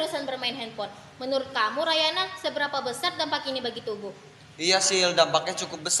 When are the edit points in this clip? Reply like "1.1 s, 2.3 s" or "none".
none